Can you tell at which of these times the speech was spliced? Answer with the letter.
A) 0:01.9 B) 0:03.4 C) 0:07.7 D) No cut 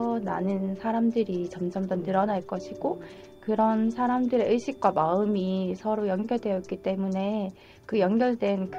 D